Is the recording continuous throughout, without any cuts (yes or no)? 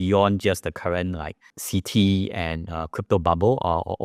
no